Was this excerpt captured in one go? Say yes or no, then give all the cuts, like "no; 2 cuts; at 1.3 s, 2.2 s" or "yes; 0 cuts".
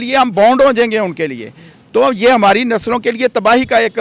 yes; 0 cuts